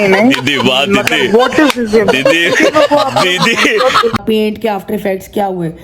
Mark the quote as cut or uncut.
cut